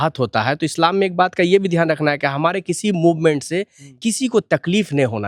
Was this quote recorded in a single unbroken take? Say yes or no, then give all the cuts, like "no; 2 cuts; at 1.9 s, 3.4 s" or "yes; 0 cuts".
yes; 0 cuts